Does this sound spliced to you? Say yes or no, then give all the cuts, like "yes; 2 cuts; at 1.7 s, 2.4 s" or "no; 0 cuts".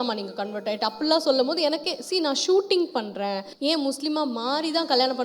yes; 1 cut; at 3.5 s